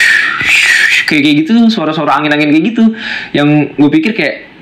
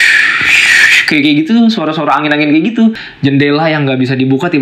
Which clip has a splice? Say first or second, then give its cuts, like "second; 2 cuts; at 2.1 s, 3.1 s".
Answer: second; 1 cut; at 3.1 s